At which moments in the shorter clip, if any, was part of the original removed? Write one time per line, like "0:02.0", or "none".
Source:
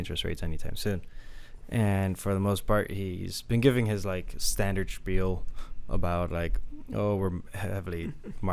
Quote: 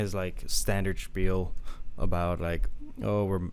none

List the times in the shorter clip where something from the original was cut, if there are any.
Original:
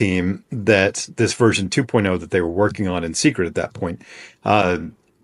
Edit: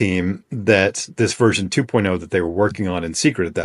none

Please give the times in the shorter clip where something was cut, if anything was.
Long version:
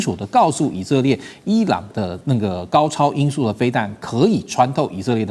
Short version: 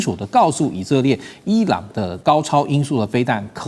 0:02.2

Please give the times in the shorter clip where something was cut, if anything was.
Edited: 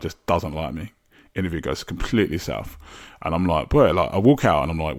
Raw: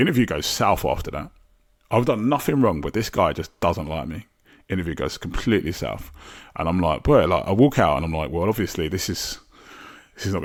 none

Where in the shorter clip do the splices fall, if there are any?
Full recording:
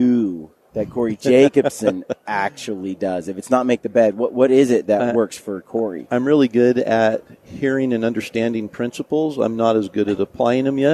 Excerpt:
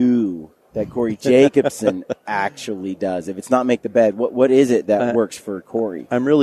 none

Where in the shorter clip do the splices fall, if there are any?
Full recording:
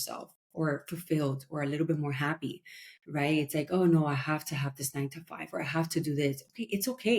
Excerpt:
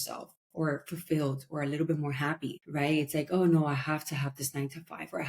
0:02.6

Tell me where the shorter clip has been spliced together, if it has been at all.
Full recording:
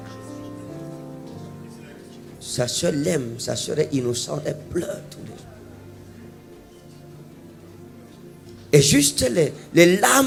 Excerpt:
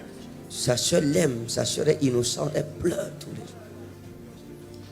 0:04.0

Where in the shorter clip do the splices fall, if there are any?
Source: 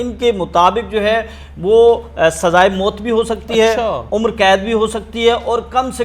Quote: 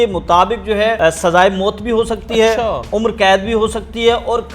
0:01.0

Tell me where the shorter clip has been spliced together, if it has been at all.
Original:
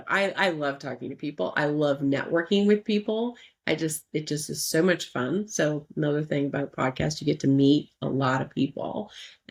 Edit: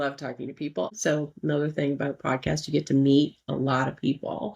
0:00.9

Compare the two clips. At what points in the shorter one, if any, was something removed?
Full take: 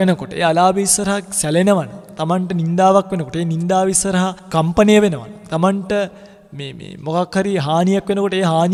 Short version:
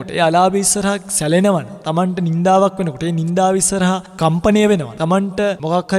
0:01.8
0:05.0

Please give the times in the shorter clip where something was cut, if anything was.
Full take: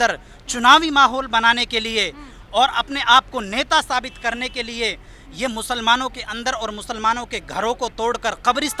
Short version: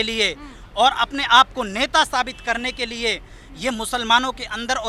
none

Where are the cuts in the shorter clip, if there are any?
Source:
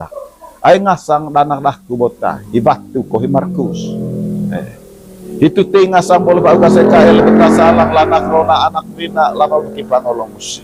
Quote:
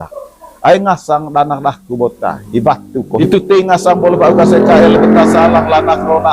0:03.2

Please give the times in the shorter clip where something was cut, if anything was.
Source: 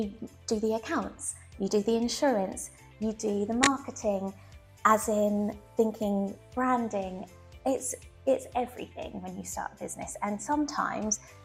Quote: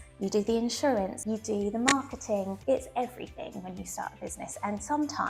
0:01.2
0:02.5

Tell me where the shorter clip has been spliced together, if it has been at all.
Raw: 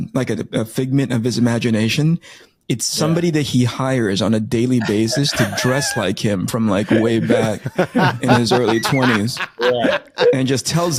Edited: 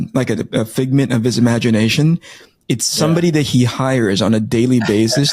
none

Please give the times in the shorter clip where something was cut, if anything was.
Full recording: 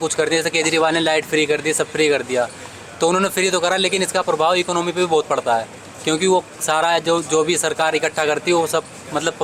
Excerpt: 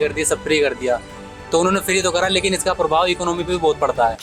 none

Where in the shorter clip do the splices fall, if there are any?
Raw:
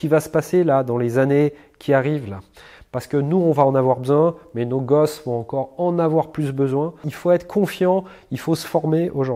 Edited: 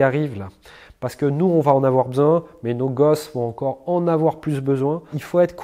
none

